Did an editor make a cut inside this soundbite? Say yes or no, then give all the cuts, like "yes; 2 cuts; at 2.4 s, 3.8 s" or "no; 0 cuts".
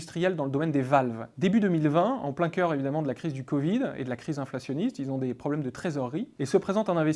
yes; 1 cut; at 1.3 s